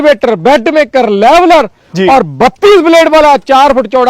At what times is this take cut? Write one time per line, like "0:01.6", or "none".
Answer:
none